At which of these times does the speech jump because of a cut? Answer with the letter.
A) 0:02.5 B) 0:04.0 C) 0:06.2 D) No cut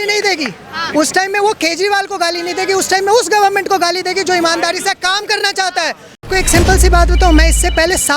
C